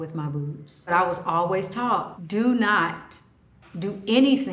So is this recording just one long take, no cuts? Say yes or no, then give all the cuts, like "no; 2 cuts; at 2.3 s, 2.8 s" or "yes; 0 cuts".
no; 2 cuts; at 0.9 s, 2.2 s